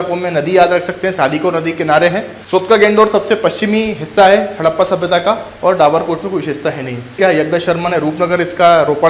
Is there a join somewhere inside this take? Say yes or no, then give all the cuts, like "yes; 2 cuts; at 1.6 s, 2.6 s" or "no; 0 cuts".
yes; 2 cuts; at 2.3 s, 7.2 s